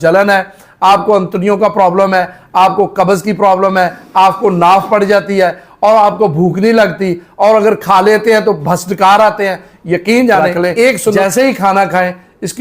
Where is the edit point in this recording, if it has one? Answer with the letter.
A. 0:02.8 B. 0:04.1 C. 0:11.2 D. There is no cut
C